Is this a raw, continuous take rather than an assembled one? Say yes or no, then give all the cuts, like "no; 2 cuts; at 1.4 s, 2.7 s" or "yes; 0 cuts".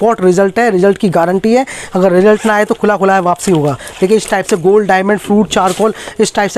yes; 0 cuts